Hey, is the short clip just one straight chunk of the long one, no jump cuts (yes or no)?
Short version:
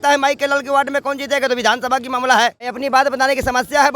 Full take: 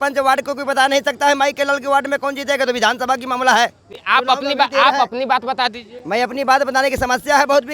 no